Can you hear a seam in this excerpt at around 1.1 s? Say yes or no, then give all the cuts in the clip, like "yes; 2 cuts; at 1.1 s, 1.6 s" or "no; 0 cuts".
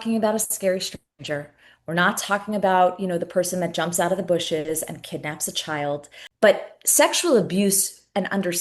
no; 1 cut; at 6.2 s